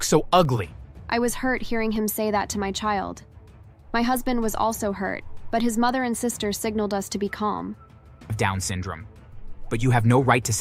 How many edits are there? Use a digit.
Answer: 1